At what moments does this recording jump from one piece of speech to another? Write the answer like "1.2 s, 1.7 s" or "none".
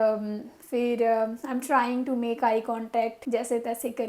3.2 s